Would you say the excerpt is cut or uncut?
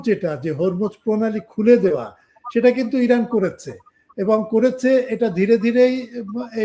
uncut